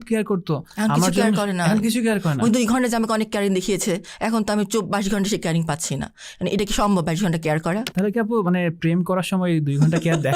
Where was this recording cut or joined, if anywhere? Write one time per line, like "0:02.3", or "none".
none